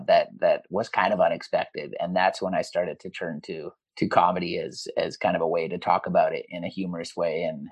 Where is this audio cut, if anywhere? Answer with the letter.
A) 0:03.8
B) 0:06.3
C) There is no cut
A